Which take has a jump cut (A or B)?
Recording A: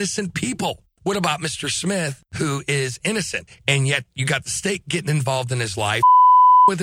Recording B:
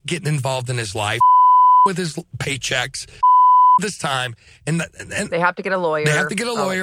A